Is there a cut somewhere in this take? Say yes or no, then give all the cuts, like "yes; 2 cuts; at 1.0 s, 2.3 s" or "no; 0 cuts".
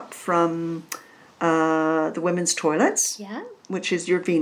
no; 0 cuts